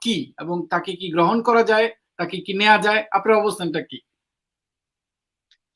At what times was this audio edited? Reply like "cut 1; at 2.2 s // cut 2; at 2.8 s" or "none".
none